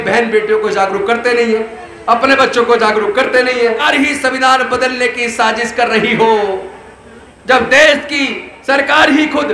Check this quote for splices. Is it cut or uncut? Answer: cut